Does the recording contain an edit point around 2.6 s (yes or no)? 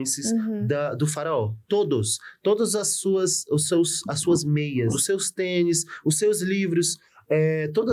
no